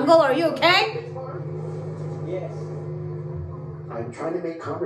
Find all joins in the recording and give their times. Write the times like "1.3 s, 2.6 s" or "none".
none